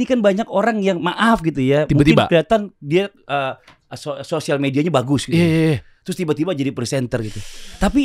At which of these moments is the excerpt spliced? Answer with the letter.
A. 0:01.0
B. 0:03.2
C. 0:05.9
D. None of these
D